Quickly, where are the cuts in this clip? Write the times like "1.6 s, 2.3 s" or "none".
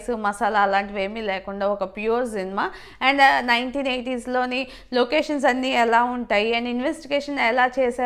none